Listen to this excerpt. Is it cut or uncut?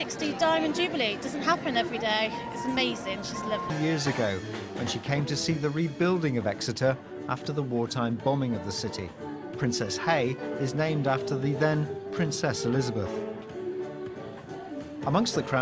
uncut